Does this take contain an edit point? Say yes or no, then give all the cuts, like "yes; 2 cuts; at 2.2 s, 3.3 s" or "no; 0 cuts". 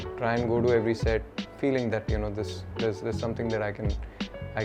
no; 0 cuts